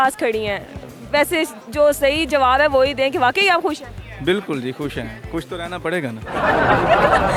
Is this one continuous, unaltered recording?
yes; 0 cuts

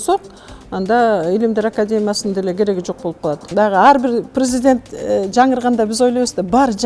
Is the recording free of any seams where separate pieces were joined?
no; 1 cut; at 3.4 s

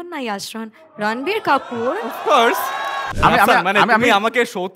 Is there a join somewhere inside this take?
yes; 1 cut; at 3.0 s

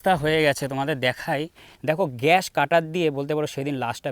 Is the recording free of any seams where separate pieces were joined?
no; 1 cut; at 1.6 s

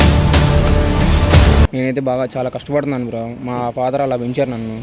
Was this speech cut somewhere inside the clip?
yes; 1 cut; at 1.7 s

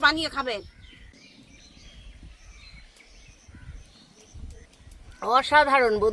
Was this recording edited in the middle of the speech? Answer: yes; 2 cuts; at 1.1 s, 4.6 s

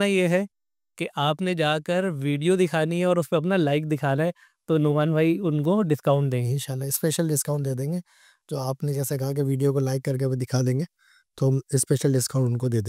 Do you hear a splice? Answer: no; 0 cuts

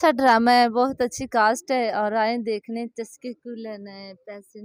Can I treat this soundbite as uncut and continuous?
yes; 0 cuts

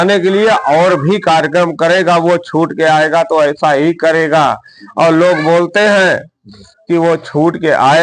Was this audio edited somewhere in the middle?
no; 0 cuts

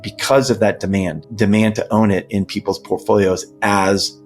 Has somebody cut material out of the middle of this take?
yes; 1 cut; at 1.2 s

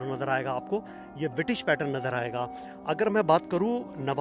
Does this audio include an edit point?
no; 0 cuts

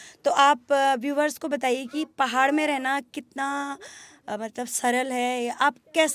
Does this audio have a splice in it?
no; 0 cuts

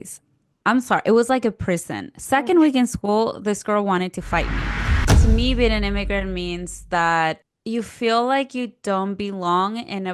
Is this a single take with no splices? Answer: no; 1 cut; at 5.1 s

